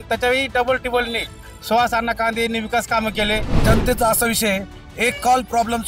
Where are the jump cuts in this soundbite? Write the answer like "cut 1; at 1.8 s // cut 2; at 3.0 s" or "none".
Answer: cut 1; at 3.6 s